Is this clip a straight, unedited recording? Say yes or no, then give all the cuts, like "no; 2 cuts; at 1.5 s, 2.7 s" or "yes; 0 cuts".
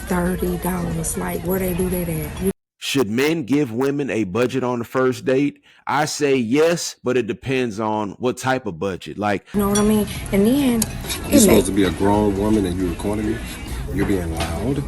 no; 2 cuts; at 2.5 s, 9.5 s